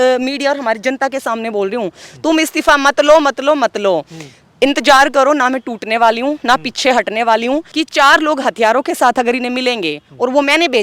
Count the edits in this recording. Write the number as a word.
one